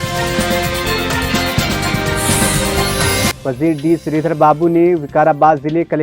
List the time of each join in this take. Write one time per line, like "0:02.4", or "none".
0:03.3